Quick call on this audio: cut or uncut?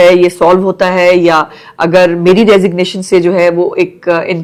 uncut